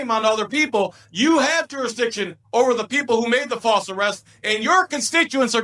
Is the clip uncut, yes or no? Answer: yes